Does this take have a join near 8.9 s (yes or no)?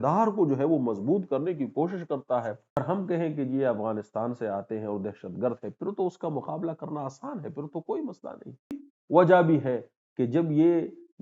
yes